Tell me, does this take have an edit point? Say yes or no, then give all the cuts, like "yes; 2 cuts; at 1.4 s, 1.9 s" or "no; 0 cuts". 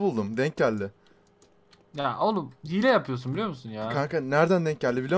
no; 0 cuts